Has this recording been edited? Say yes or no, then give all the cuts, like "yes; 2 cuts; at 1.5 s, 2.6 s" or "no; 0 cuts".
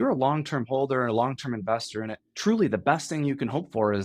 yes; 1 cut; at 2.2 s